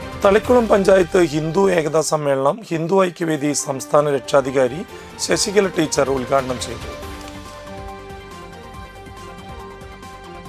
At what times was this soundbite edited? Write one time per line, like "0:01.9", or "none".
none